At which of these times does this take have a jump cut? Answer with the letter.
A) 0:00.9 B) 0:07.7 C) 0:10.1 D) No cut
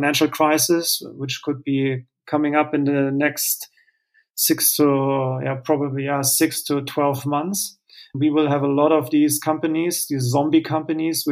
D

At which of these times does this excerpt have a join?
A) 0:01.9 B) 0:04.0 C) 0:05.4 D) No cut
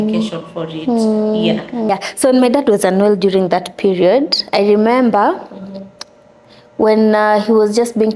A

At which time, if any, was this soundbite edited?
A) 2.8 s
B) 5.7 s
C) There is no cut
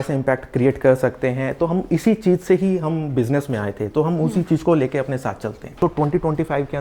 B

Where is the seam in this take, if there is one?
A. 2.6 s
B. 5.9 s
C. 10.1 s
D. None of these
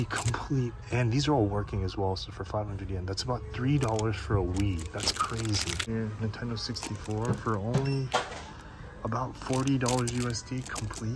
B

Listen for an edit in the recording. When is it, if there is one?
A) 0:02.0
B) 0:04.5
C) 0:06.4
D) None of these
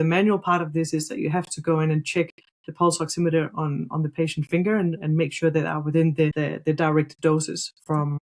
C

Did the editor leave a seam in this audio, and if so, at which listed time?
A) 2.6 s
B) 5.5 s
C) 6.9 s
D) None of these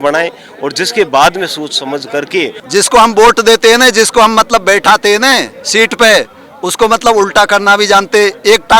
A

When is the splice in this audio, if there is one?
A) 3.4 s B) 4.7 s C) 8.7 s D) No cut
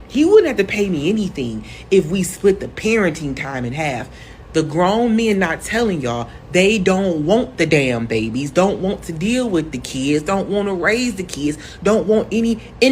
A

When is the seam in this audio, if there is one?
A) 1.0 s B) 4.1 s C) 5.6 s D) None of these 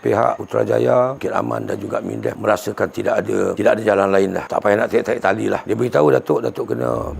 C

